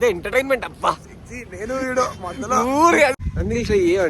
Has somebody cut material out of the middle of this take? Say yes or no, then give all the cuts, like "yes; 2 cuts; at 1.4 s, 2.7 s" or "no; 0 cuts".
yes; 1 cut; at 3.1 s